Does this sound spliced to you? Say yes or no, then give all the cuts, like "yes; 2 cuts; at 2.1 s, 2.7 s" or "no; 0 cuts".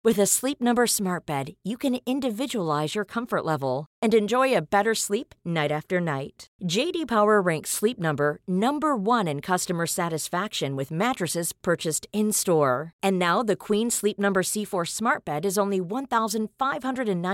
no; 0 cuts